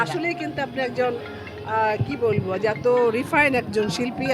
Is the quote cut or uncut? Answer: uncut